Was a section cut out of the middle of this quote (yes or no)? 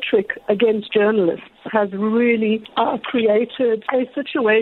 yes